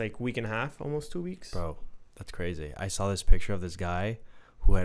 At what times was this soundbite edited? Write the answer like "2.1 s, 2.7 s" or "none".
none

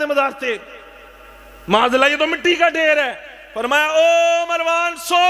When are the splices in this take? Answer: none

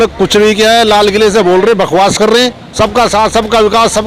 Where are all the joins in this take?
2.6 s

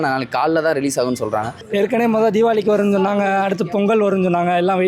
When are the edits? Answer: 1.6 s

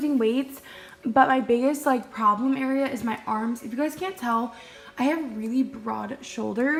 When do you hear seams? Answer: none

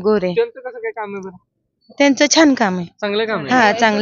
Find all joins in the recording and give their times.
none

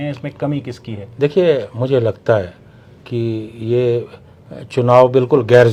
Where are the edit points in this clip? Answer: none

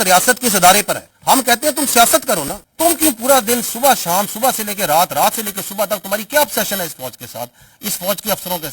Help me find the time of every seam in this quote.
none

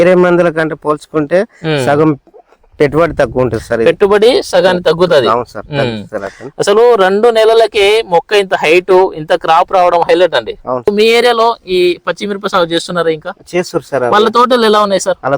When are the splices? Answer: 10.9 s

